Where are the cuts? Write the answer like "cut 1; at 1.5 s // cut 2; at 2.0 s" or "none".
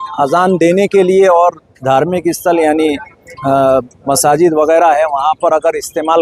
none